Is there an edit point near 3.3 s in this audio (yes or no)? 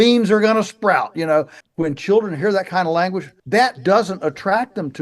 yes